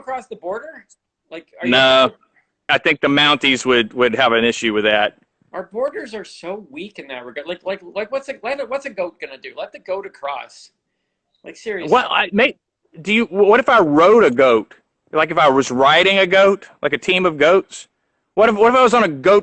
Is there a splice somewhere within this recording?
yes; 1 cut; at 2.6 s

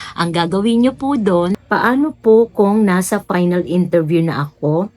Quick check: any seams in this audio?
yes; 1 cut; at 1.6 s

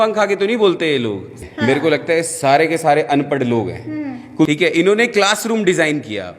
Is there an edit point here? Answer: yes; 2 cuts; at 1.3 s, 4.5 s

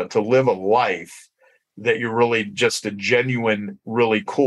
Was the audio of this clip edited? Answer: no; 0 cuts

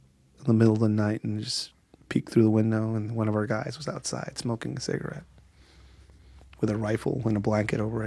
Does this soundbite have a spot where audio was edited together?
no; 0 cuts

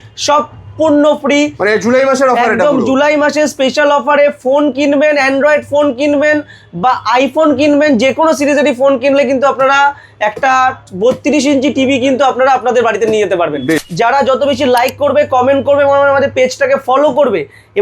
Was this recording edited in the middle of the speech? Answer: yes; 1 cut; at 13.8 s

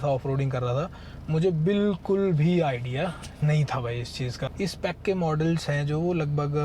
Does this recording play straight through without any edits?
no; 1 cut; at 4.5 s

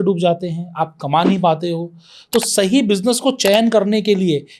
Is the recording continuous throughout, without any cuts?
yes; 0 cuts

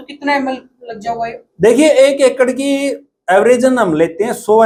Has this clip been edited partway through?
no; 0 cuts

